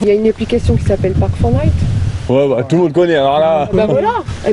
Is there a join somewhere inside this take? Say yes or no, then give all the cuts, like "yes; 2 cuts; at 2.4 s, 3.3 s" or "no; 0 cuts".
no; 0 cuts